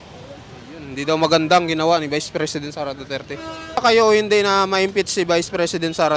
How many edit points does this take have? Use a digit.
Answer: 1